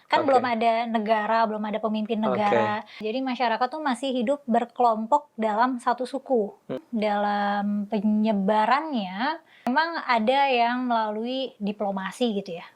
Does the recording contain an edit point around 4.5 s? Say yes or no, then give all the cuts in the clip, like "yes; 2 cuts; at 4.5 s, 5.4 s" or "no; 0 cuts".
no; 3 cuts; at 2.9 s, 6.8 s, 9.7 s